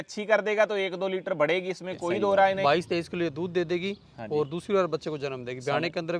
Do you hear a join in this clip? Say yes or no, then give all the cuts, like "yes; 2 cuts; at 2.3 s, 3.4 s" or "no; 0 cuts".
yes; 1 cut; at 2.6 s